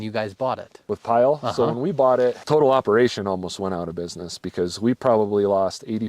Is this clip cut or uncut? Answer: cut